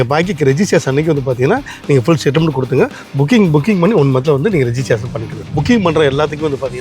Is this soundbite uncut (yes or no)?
no